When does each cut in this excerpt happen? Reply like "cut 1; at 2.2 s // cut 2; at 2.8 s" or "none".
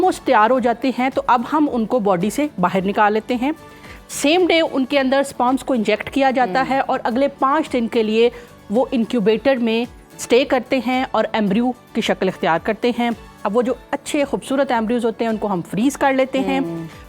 none